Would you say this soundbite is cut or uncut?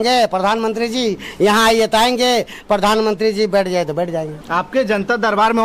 cut